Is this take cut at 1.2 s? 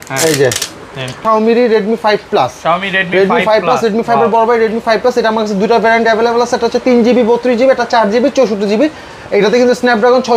yes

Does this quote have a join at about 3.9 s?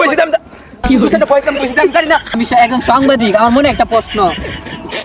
no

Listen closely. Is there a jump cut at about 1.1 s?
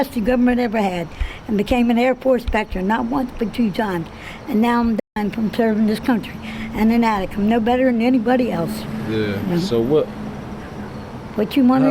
no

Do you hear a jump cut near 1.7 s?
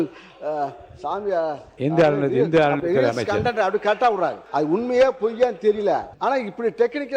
no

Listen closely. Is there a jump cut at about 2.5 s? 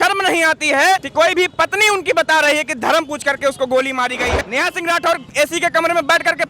no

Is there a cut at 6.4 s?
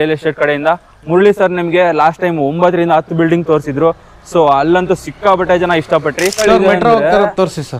yes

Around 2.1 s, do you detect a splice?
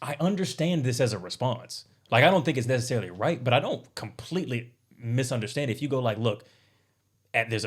no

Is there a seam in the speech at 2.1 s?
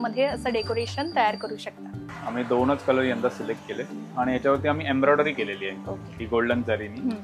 yes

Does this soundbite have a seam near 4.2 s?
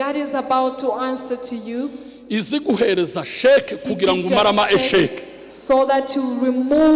no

